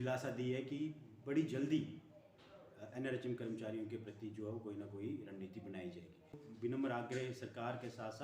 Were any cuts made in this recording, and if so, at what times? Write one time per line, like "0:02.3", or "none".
0:06.4